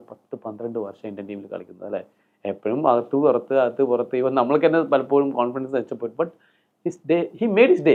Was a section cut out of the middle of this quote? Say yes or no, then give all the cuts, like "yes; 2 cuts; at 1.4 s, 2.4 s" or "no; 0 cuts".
no; 0 cuts